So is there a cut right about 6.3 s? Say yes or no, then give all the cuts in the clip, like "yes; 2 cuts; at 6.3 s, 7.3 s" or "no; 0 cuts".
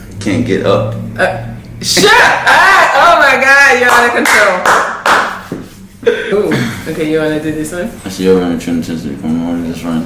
yes; 1 cut; at 6.3 s